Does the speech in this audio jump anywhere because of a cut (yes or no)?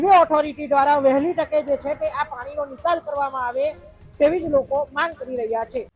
no